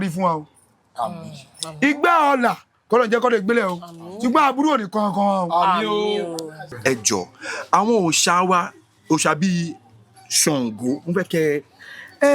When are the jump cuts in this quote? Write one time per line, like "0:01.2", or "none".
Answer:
0:06.6